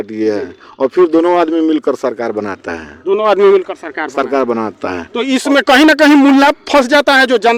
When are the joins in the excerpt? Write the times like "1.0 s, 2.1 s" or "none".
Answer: none